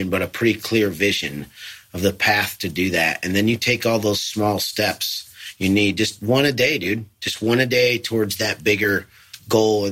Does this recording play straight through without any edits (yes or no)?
yes